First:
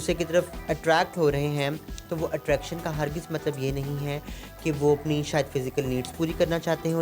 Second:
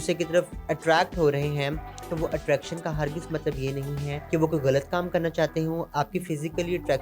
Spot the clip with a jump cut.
second; 2 cuts; at 4.1 s, 5.9 s

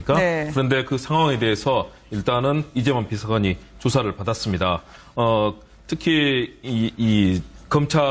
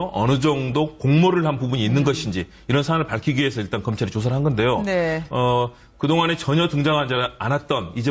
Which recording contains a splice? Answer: second; 1 cut; at 0.9 s

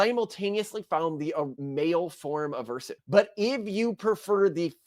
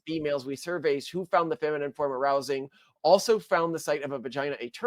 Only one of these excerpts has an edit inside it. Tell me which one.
first; 2 cuts; at 1.6 s, 2.9 s

